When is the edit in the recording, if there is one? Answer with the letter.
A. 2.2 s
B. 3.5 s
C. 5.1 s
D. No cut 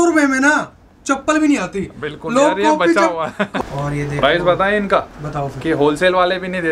B